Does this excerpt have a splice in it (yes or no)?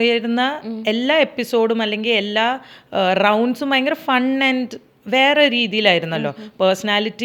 no